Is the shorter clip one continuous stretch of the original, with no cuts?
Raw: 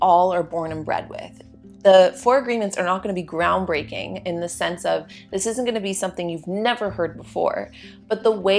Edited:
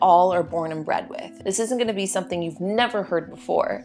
no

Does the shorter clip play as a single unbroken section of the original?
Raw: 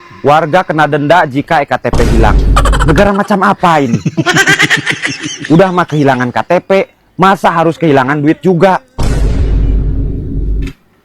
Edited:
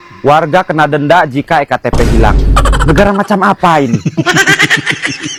yes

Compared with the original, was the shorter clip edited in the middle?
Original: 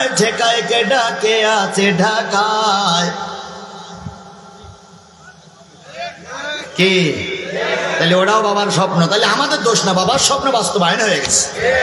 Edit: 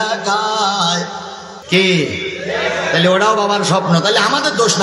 yes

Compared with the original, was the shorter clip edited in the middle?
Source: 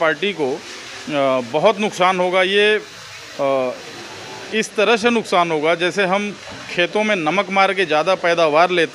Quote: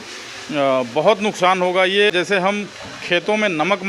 yes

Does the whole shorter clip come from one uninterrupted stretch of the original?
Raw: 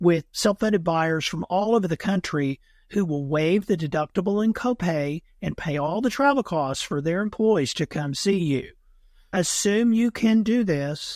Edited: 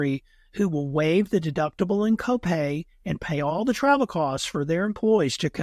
yes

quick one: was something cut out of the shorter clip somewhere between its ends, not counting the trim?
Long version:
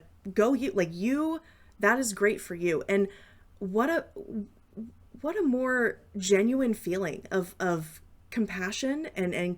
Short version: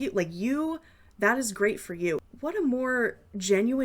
yes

